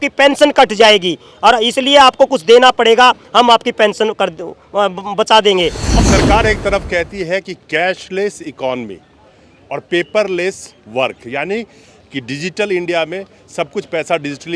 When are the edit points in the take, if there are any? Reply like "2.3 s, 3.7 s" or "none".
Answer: 5.8 s